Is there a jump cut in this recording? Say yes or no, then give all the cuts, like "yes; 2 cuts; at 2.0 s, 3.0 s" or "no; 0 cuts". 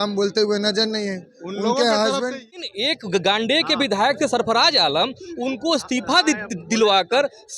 yes; 1 cut; at 2.6 s